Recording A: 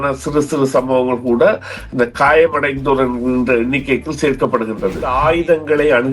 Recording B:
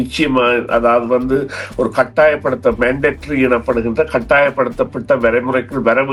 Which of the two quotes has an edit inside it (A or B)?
A